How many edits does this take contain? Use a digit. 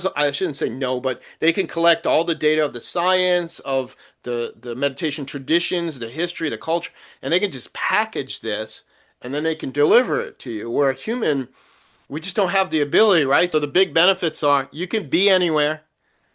1